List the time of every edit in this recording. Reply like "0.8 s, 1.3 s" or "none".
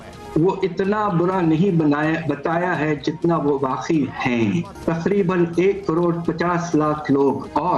4.7 s